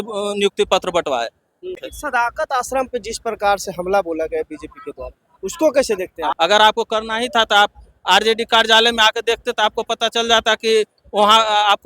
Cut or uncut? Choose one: cut